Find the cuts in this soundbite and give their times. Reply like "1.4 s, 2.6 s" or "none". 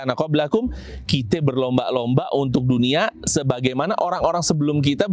none

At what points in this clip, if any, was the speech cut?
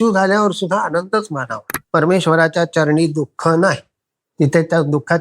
1.7 s

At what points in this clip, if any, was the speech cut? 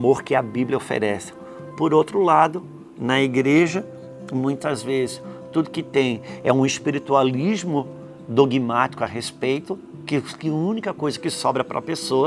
9.9 s

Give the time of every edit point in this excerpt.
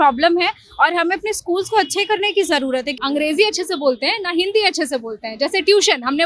2.9 s

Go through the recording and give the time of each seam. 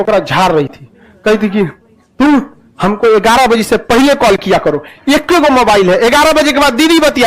none

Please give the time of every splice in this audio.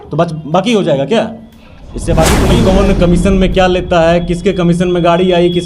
2.5 s

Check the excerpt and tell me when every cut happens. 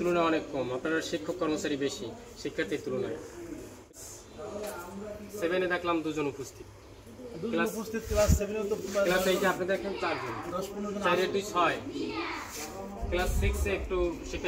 3.9 s

